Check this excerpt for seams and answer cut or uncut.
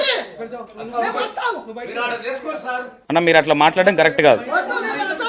uncut